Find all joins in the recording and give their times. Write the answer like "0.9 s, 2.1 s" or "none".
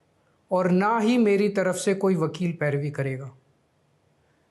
none

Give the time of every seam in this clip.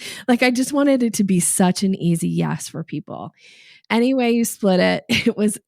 3.9 s

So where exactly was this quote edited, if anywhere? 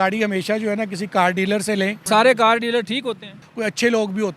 2.0 s, 3.5 s

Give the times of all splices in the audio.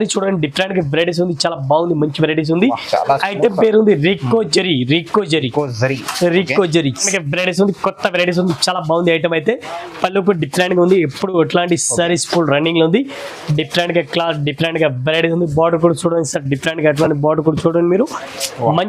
7.1 s

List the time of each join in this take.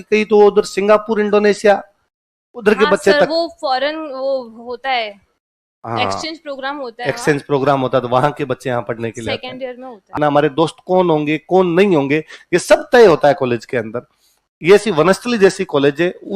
10.1 s

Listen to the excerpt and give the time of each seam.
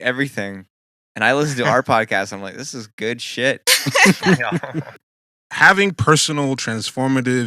5.0 s

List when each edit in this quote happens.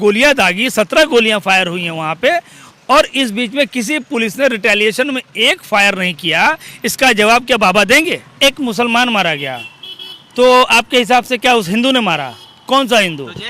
8.3 s

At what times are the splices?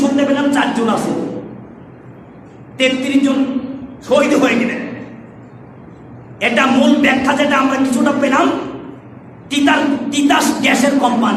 none

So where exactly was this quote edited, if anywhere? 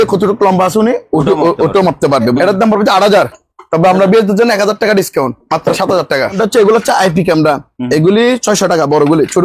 2.4 s, 6.4 s

